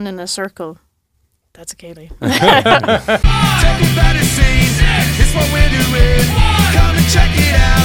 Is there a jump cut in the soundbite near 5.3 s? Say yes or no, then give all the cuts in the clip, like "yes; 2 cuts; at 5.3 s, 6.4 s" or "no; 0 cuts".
no; 1 cut; at 3.2 s